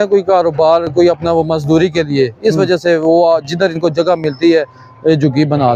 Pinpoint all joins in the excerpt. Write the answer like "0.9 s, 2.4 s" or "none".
none